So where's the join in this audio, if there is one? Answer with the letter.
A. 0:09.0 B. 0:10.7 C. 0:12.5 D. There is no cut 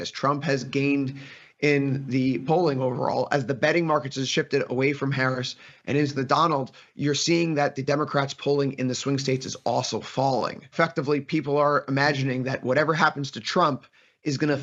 B